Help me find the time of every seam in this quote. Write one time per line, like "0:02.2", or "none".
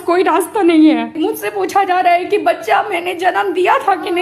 0:01.1